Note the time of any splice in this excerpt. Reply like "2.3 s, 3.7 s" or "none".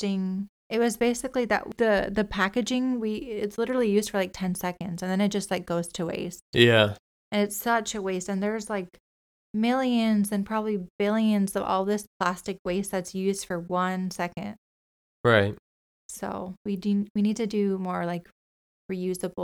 1.7 s

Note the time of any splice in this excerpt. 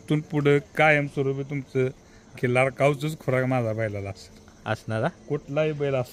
none

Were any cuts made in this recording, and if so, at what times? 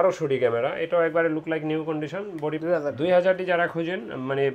2.6 s

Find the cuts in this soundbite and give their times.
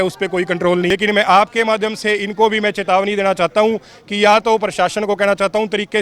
0.9 s

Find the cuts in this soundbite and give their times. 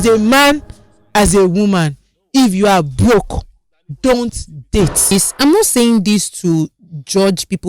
5.1 s

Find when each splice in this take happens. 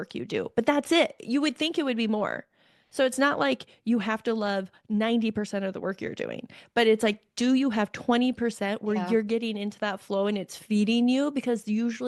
none

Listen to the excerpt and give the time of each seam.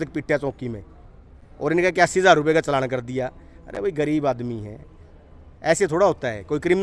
none

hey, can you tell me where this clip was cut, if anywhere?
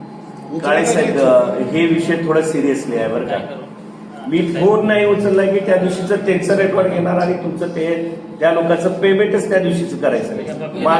none

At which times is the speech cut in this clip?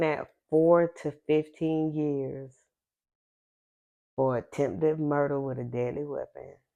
none

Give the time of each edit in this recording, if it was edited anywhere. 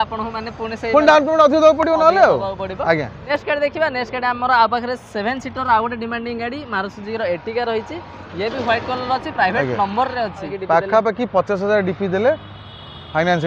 3.2 s, 10.5 s

